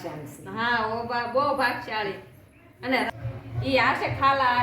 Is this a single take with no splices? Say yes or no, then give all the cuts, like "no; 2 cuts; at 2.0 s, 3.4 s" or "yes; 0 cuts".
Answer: no; 1 cut; at 3.1 s